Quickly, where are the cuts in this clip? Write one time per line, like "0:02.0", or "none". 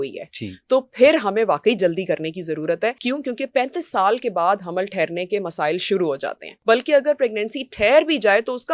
0:03.0
0:06.5